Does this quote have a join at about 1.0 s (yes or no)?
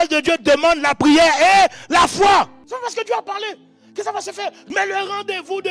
no